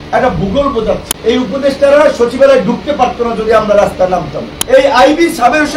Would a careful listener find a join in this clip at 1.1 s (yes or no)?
yes